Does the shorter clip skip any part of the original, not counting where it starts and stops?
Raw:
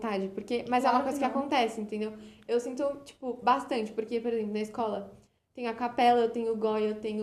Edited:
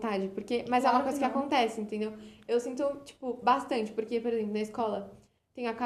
no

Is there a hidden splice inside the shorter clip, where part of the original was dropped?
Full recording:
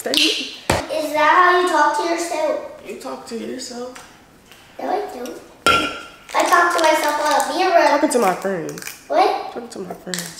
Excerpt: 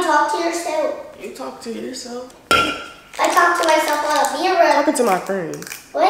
yes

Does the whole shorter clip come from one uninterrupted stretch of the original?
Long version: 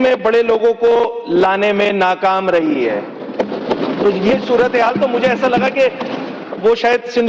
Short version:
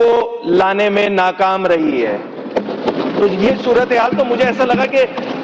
yes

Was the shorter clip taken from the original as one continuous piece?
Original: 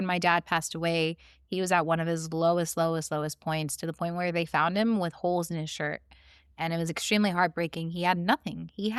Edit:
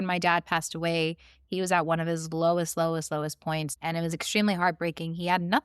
no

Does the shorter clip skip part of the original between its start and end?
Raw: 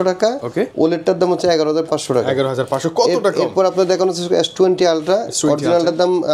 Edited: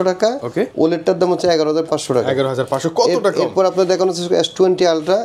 no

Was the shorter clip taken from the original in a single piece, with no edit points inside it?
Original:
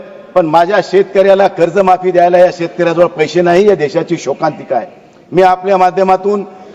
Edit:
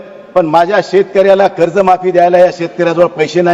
yes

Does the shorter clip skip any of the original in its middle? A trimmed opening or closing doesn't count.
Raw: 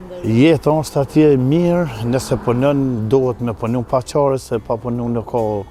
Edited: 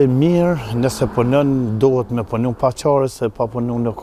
no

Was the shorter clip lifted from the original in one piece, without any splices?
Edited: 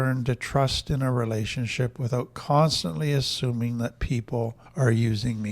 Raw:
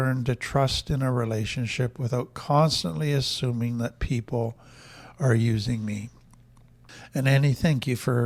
no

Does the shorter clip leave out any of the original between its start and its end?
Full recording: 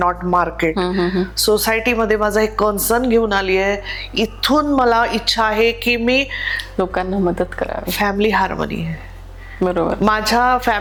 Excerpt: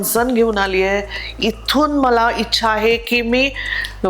no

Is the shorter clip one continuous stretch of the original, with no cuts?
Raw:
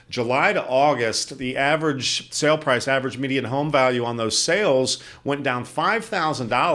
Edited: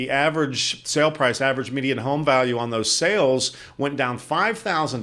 yes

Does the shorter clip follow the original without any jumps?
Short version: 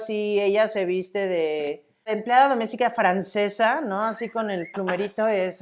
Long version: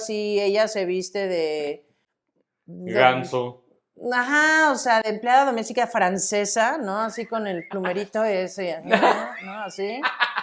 no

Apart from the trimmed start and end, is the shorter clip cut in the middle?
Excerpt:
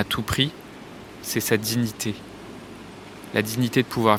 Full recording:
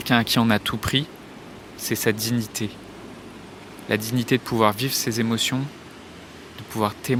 no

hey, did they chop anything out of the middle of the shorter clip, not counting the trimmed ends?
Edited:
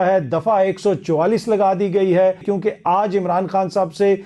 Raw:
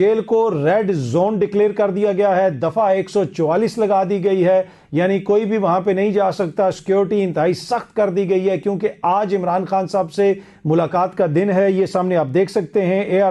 yes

